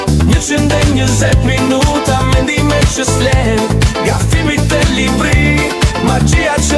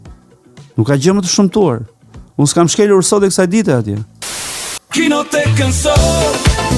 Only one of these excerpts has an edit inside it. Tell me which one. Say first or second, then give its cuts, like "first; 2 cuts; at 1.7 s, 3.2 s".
second; 1 cut; at 4.6 s